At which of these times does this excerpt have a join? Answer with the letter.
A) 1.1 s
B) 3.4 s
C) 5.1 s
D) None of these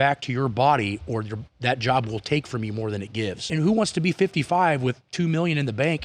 B